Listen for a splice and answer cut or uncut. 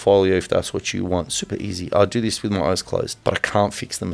cut